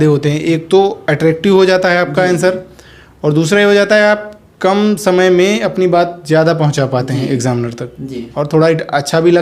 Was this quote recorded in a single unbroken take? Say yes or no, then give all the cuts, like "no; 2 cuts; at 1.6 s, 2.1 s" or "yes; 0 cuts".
yes; 0 cuts